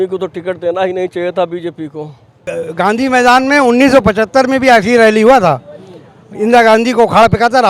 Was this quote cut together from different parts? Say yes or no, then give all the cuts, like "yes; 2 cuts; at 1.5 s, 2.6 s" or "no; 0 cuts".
yes; 1 cut; at 2.5 s